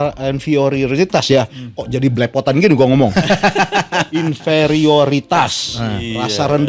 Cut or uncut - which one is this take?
uncut